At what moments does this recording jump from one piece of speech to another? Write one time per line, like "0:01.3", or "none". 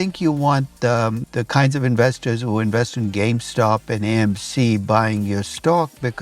0:01.2